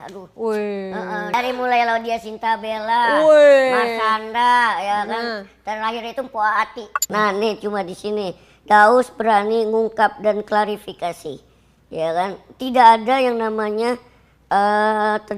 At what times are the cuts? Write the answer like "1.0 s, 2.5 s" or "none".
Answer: 1.3 s, 7.0 s